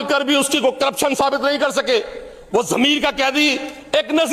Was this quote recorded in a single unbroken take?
yes; 0 cuts

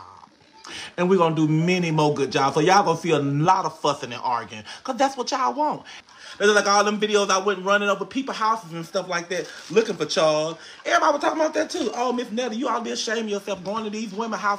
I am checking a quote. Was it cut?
no; 0 cuts

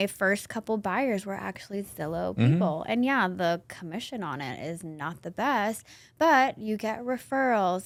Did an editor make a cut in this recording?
no; 0 cuts

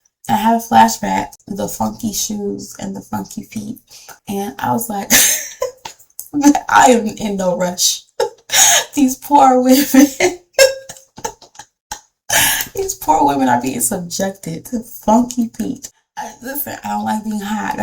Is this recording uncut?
no; 2 cuts; at 1.4 s, 15.8 s

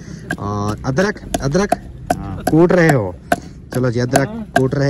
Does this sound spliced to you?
no; 0 cuts

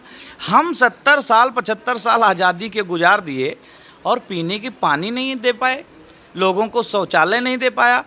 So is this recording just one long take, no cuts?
yes; 0 cuts

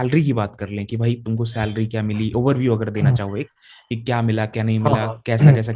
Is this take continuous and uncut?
yes; 0 cuts

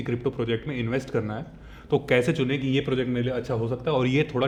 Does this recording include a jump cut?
no; 0 cuts

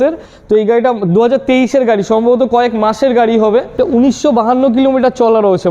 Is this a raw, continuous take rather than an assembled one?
no; 1 cut; at 3.8 s

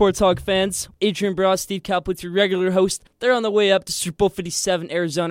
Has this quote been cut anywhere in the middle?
yes; 2 cuts; at 0.8 s, 3.1 s

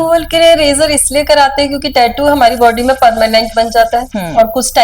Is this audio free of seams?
yes; 0 cuts

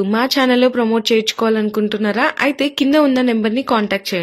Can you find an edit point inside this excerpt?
no; 0 cuts

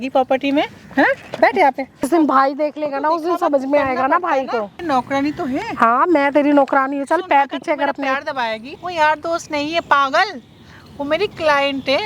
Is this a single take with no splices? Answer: no; 3 cuts; at 2.1 s, 4.8 s, 8.8 s

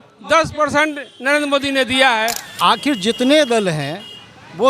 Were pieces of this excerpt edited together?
yes; 1 cut; at 2.4 s

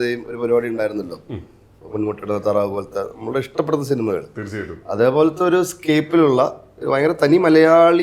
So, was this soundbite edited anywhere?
no; 0 cuts

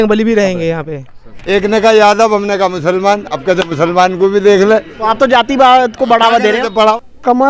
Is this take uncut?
no; 2 cuts; at 1.3 s, 6.6 s

